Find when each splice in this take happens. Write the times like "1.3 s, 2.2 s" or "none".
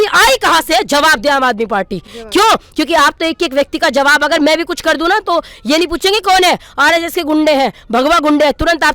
none